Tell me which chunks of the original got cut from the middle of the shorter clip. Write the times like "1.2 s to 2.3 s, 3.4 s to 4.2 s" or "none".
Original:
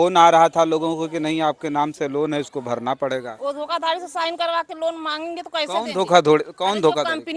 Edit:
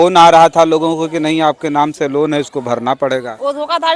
none